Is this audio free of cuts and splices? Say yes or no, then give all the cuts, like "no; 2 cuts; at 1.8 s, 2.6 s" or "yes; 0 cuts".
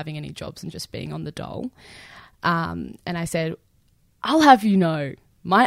yes; 0 cuts